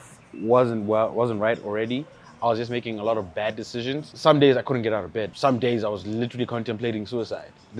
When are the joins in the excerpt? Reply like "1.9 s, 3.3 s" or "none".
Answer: 4.1 s, 5.3 s